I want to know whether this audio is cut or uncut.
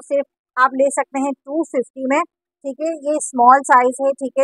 uncut